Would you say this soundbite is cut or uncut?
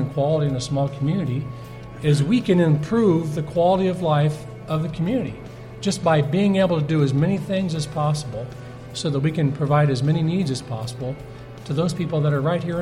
uncut